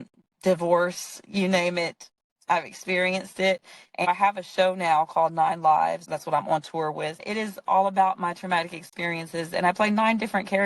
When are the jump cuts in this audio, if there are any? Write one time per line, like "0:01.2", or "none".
0:04.1
0:06.0
0:07.2